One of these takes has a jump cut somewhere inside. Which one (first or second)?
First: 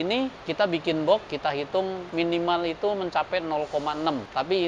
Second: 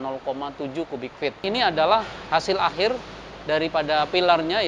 second